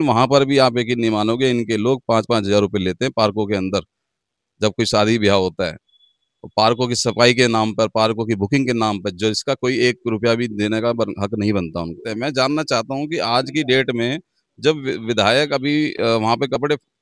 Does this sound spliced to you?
yes; 1 cut; at 12.0 s

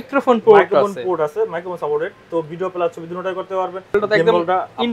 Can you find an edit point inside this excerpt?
yes; 1 cut; at 3.9 s

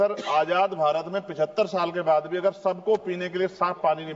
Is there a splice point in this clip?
no; 0 cuts

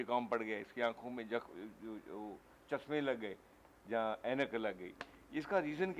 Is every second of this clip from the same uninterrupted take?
yes; 0 cuts

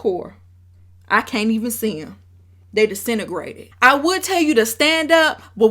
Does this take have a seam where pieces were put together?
yes; 1 cut; at 3.6 s

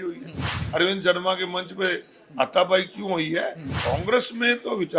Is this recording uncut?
no; 1 cut; at 3.7 s

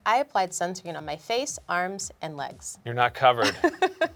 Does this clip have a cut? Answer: no; 0 cuts

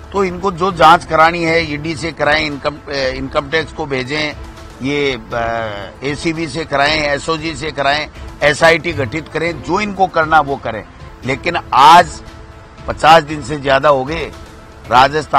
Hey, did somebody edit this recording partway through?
no; 0 cuts

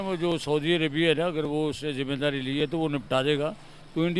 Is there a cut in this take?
no; 0 cuts

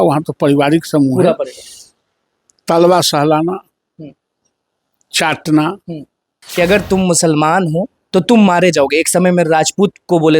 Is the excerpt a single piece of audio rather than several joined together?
no; 1 cut; at 6.4 s

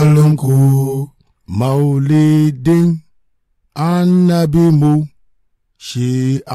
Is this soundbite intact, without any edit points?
no; 1 cut; at 1.2 s

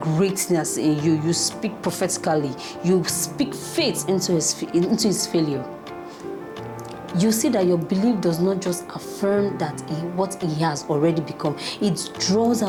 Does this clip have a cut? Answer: no; 0 cuts

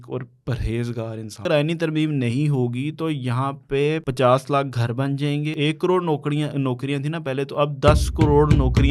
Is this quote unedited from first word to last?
no; 3 cuts; at 1.4 s, 4.1 s, 5.5 s

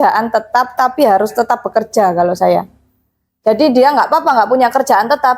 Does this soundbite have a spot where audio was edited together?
no; 0 cuts

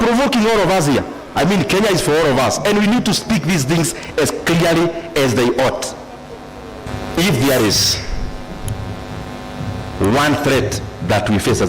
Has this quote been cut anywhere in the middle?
yes; 1 cut; at 6.9 s

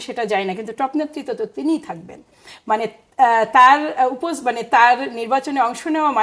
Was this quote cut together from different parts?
no; 0 cuts

